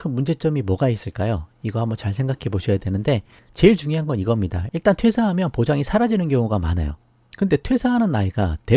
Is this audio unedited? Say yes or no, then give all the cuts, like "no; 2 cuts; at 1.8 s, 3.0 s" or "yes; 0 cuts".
yes; 0 cuts